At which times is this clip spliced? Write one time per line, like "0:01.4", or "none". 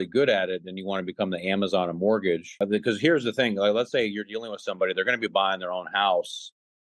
0:02.6